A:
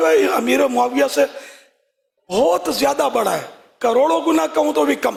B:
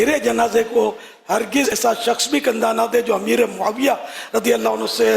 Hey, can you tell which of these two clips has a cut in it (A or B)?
B